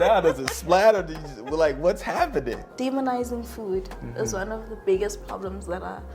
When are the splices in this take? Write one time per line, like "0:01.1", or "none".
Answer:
0:02.6